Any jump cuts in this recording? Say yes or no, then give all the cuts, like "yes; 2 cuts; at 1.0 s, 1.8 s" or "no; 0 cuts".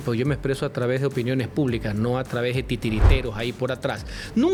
no; 0 cuts